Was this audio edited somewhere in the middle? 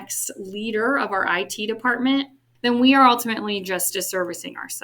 yes; 1 cut; at 2.5 s

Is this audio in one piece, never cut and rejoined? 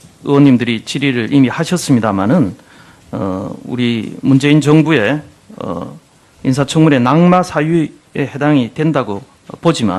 no; 1 cut; at 4.0 s

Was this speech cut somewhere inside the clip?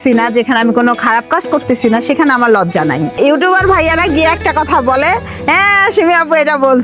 yes; 1 cut; at 3.1 s

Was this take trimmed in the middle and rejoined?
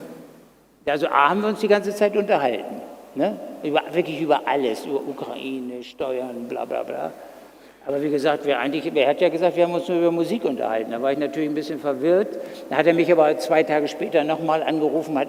no; 0 cuts

